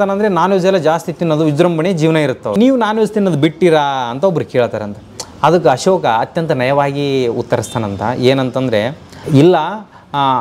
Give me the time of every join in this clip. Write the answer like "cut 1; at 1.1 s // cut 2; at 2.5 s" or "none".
cut 1; at 2.5 s // cut 2; at 9.2 s